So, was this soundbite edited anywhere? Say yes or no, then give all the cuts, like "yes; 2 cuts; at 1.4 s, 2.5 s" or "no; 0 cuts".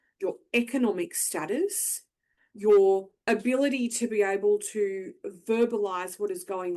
yes; 1 cut; at 3.1 s